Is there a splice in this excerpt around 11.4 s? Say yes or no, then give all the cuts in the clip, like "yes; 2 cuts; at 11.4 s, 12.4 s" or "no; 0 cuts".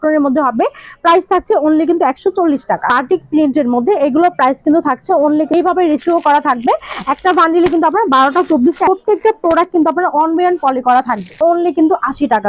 yes; 4 cuts; at 2.9 s, 5.5 s, 8.9 s, 11.4 s